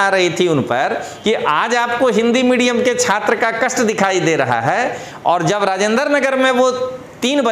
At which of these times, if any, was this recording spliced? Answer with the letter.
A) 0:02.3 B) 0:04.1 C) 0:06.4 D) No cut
D